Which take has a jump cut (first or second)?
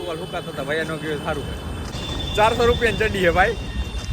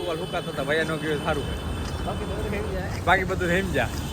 first